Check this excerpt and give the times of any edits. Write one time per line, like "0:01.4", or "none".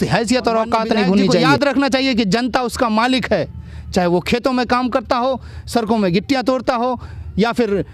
0:01.5